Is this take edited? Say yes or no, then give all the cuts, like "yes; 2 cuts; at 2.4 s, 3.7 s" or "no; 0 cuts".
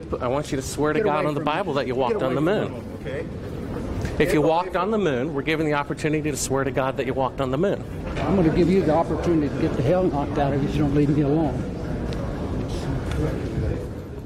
no; 0 cuts